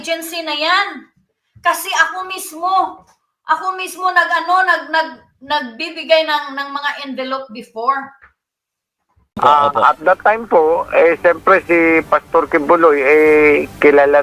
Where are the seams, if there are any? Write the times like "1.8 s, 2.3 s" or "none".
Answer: 9.4 s